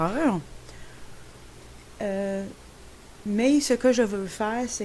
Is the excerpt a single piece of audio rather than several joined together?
no; 1 cut; at 3.6 s

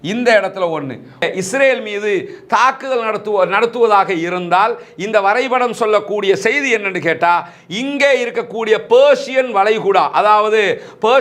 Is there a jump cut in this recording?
yes; 1 cut; at 1.3 s

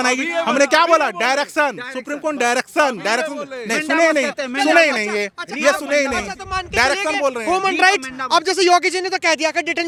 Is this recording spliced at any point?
no; 0 cuts

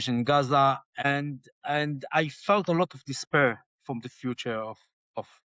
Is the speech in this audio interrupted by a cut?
yes; 1 cut; at 1.0 s

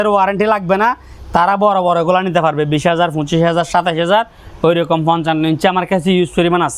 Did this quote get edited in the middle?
no; 0 cuts

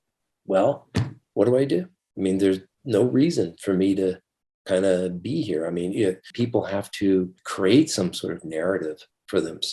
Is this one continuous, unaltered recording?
no; 2 cuts; at 6.3 s, 7.4 s

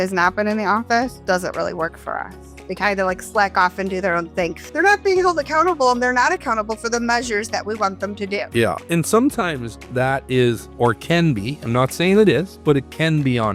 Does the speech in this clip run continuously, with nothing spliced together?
yes; 0 cuts

